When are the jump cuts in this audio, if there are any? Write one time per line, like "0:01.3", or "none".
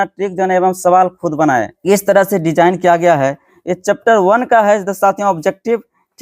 0:01.7